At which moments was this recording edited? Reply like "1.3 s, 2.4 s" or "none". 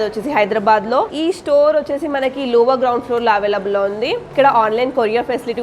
1.1 s, 4.3 s